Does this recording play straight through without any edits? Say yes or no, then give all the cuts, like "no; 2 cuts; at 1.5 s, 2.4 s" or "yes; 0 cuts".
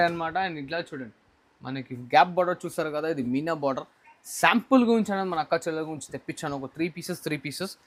yes; 0 cuts